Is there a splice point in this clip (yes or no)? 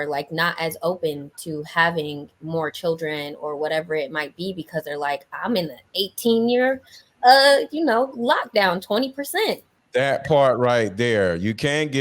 yes